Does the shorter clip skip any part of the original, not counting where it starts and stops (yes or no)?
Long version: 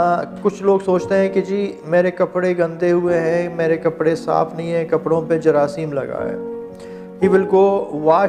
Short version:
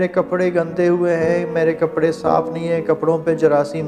no